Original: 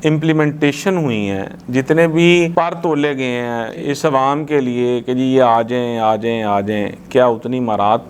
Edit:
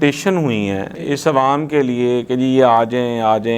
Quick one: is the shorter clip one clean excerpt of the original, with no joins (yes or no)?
no